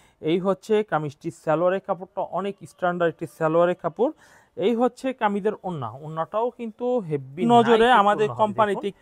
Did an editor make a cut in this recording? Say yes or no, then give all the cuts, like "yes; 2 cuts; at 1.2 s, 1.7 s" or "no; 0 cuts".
yes; 1 cut; at 7.4 s